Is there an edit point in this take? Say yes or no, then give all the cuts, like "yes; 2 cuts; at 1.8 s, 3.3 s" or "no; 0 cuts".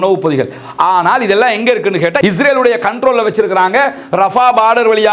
yes; 1 cut; at 2.2 s